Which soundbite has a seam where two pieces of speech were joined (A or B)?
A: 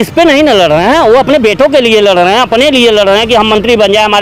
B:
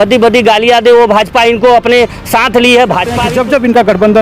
B